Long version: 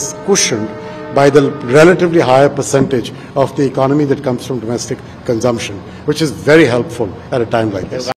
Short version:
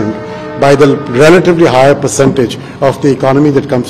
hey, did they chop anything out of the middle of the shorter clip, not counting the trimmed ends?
no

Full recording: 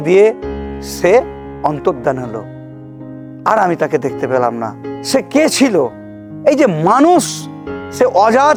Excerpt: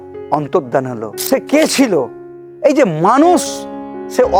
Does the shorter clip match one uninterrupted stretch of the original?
no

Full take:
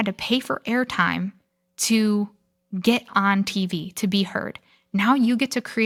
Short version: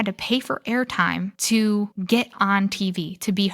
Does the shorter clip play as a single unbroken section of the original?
no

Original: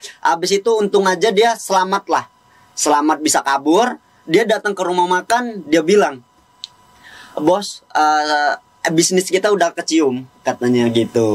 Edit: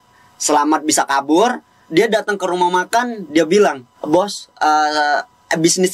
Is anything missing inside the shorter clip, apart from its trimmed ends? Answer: yes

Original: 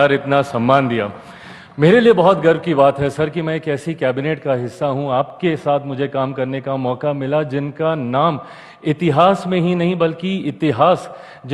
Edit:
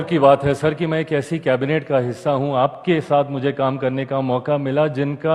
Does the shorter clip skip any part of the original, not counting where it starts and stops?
no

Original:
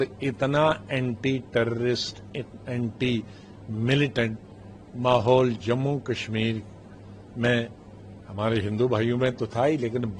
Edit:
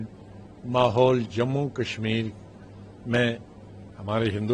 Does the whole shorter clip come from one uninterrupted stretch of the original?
yes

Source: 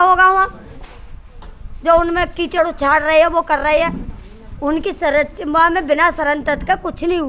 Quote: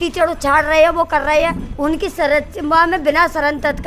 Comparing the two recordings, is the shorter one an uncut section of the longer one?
no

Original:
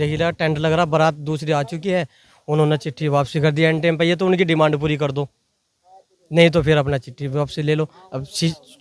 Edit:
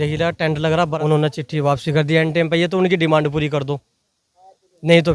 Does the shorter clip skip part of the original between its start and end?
yes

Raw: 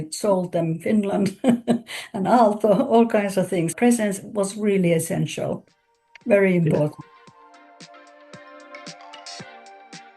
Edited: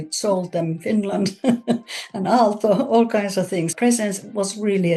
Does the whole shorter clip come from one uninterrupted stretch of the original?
yes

